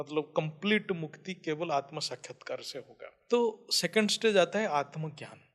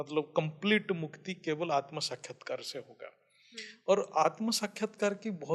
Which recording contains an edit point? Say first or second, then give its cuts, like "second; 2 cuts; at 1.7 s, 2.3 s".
first; 1 cut; at 3.1 s